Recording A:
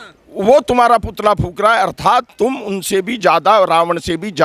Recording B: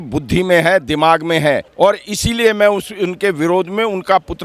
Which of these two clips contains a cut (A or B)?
B